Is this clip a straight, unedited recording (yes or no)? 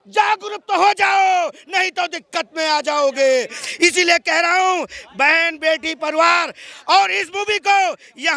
yes